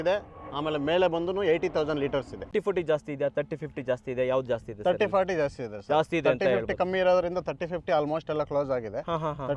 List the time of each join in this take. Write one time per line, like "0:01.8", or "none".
0:02.5

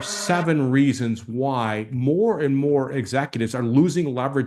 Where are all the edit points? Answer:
none

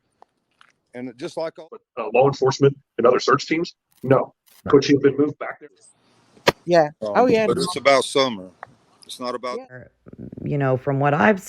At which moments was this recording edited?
0:01.9
0:05.6
0:09.9

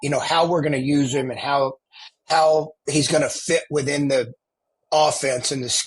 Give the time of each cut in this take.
none

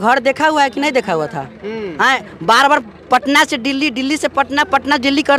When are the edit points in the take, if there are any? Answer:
none

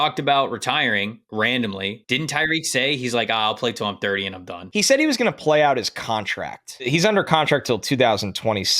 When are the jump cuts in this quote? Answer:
0:01.2
0:02.3
0:04.6
0:06.9

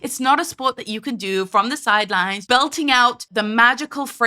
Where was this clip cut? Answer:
0:02.4
0:03.2

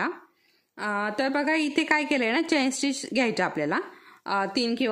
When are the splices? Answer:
none

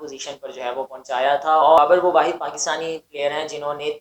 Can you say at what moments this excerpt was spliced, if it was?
0:01.8

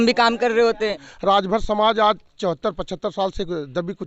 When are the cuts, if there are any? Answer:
0:01.1

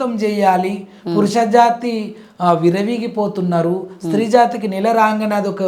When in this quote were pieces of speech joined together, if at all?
none

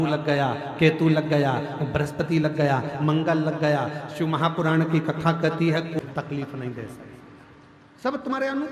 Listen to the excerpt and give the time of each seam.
0:06.0

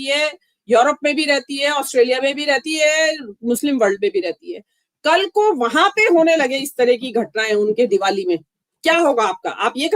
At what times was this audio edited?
0:08.5

